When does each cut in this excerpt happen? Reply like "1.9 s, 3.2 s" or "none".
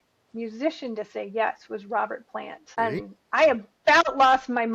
2.7 s